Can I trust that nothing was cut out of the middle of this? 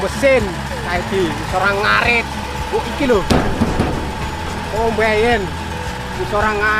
yes; 0 cuts

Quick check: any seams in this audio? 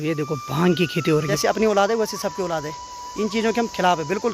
yes; 1 cut; at 1.3 s

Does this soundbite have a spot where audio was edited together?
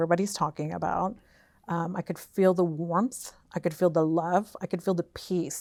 no; 0 cuts

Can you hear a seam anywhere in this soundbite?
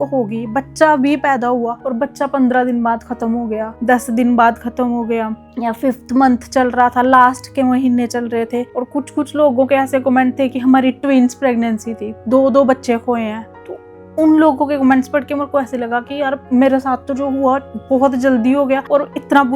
no; 0 cuts

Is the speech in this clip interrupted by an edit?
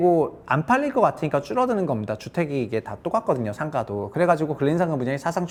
no; 0 cuts

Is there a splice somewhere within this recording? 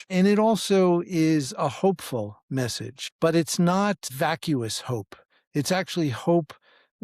yes; 2 cuts; at 3.0 s, 4.1 s

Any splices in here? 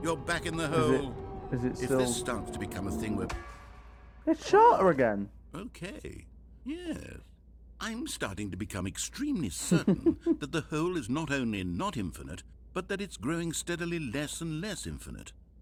no; 0 cuts

